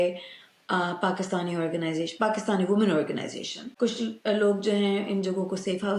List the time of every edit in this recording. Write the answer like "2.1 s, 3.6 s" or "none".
3.7 s